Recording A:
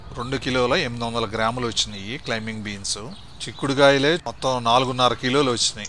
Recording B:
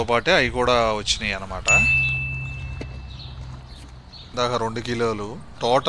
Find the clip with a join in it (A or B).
B